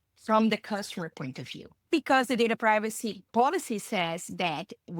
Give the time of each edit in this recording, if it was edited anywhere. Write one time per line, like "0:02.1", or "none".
0:01.9
0:03.3